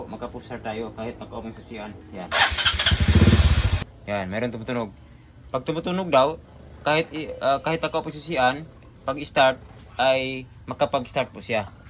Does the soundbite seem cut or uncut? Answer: cut